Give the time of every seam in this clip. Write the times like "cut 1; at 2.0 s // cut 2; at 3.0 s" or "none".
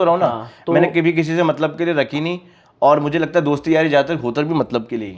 none